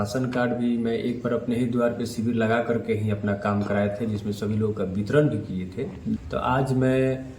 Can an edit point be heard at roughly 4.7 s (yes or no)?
no